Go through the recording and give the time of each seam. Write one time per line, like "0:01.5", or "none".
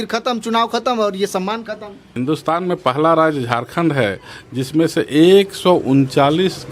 0:02.0